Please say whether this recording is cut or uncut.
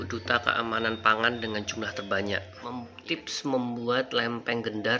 cut